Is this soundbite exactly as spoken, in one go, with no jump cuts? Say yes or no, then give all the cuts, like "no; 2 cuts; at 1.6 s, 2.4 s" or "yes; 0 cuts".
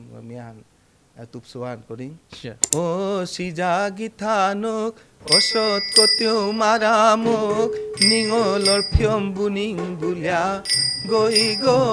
no; 1 cut; at 2.7 s